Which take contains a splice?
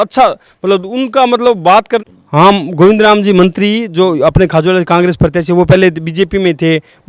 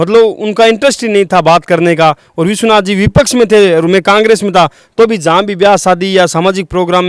first; 1 cut; at 2.0 s

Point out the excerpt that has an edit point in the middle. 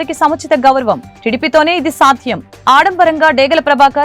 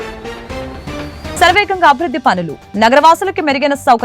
second; 1 cut; at 1.4 s

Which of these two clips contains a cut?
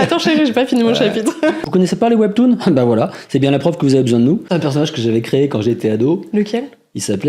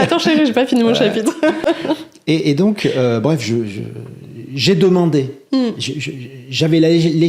first; 2 cuts; at 1.6 s, 4.5 s

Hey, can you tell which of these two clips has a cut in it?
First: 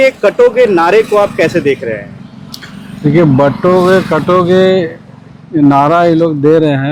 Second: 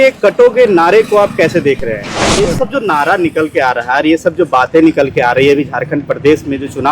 second; 1 cut; at 2.4 s

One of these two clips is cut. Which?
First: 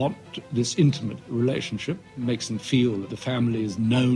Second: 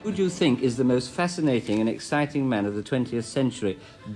first; 2 cuts; at 1.2 s, 3.1 s

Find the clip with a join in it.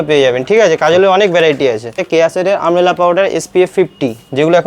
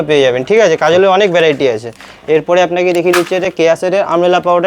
first; 1 cut; at 2.0 s

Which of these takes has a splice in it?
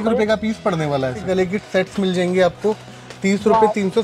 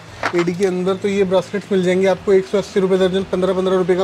first; 1 cut; at 1.2 s

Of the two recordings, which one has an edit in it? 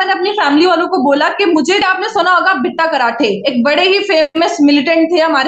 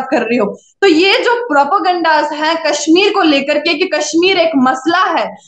first; 1 cut; at 1.8 s

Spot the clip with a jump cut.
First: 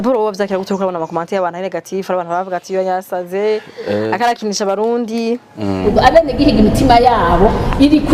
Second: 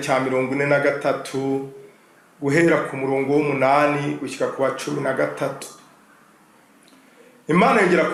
first; 1 cut; at 5.9 s

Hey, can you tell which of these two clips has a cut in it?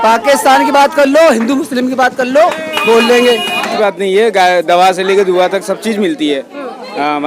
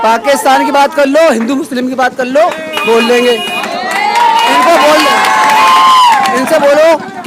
first; 1 cut; at 3.7 s

